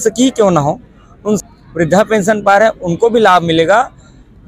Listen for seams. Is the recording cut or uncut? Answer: cut